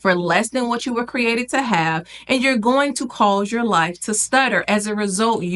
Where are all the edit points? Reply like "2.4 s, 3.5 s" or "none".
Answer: none